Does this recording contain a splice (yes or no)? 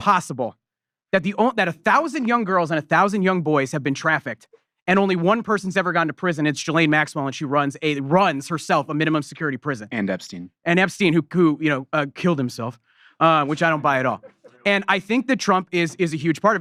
no